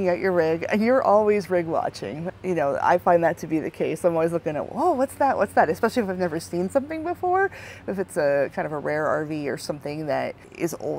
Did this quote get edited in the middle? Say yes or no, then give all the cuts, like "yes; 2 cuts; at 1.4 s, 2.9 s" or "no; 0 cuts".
no; 0 cuts